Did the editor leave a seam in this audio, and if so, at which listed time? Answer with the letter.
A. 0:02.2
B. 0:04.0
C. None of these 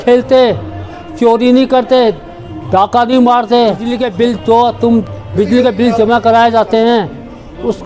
B